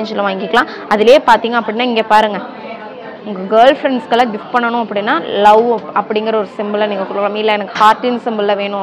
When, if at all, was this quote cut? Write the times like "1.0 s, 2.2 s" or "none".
none